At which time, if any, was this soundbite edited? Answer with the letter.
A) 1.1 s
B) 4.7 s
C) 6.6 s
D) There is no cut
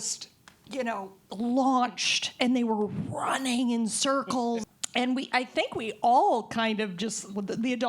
B